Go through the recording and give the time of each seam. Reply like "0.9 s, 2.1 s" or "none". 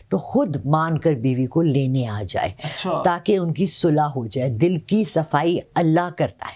none